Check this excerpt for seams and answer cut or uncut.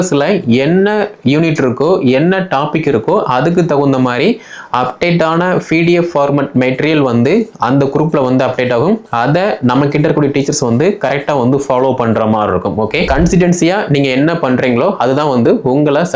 cut